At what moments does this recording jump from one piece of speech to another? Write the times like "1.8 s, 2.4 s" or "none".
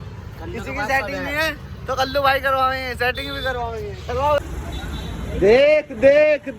4.4 s